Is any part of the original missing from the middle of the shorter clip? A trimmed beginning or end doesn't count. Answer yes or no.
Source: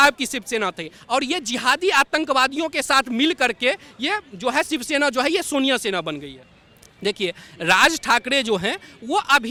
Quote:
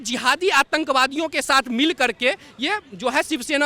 no